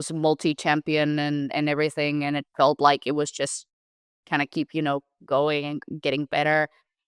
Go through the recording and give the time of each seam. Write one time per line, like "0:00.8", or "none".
none